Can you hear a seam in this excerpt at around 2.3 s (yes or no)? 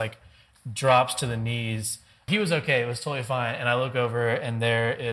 yes